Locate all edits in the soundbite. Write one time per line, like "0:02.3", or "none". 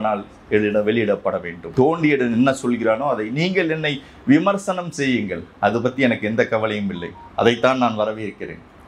0:01.5